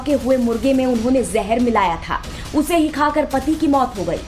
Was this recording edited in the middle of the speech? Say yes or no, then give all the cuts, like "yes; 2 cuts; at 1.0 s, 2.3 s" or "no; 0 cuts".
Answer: yes; 1 cut; at 1.1 s